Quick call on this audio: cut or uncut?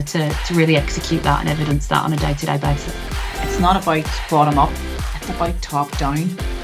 cut